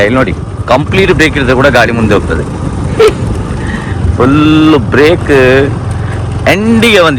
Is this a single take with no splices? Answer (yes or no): yes